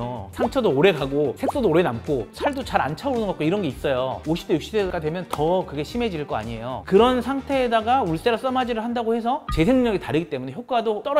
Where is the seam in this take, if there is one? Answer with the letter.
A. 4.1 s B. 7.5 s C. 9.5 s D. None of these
C